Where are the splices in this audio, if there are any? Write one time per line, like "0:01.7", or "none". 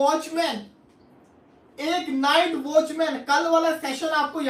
none